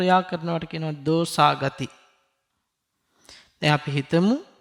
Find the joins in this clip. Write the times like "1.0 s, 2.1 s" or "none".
none